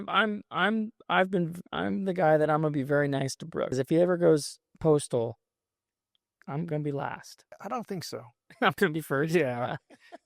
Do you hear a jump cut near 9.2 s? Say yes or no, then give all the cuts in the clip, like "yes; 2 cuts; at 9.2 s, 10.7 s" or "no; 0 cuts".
no; 2 cuts; at 3.7 s, 7.6 s